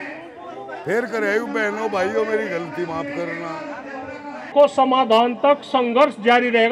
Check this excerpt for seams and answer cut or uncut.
cut